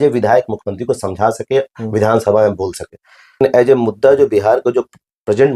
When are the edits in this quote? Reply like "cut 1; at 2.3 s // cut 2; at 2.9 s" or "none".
cut 1; at 3.4 s